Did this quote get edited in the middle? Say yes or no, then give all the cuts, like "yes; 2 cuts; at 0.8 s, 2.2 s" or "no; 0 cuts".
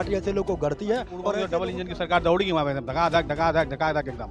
yes; 1 cut; at 1.4 s